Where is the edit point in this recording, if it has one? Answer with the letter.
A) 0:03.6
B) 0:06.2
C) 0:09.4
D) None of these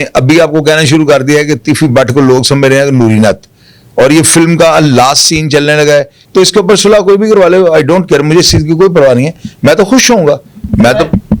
B